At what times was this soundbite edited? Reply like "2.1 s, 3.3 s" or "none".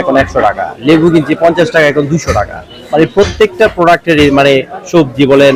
none